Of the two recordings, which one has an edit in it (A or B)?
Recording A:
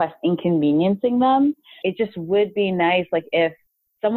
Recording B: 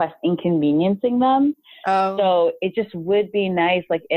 A